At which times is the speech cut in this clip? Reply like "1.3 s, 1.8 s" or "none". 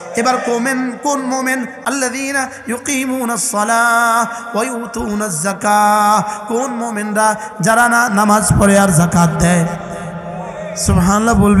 1.7 s